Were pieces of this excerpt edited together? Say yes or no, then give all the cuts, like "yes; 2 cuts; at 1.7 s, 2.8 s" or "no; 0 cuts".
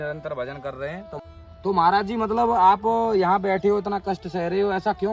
yes; 1 cut; at 1.2 s